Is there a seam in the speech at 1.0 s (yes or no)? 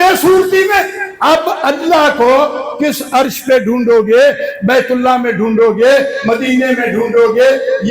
yes